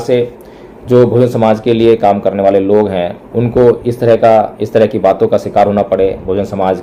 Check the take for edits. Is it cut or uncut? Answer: uncut